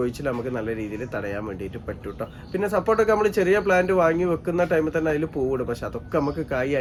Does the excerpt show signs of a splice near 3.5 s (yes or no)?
no